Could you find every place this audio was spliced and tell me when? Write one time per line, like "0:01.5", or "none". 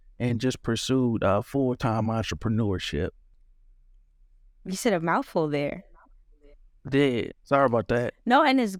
none